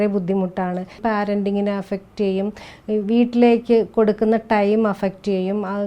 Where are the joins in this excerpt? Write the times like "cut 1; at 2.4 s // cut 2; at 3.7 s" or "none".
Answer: cut 1; at 1.0 s